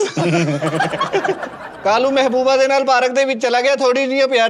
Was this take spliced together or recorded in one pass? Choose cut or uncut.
cut